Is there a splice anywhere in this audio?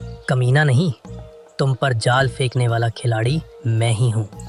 no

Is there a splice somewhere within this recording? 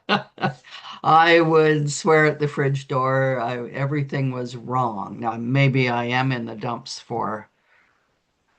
yes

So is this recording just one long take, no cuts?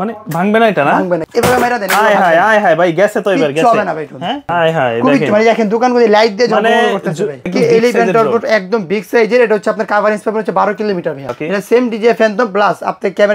no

